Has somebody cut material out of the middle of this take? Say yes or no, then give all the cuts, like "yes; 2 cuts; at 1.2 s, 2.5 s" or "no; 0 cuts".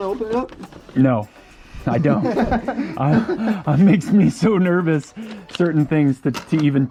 no; 0 cuts